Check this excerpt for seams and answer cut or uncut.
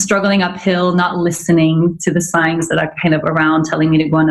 uncut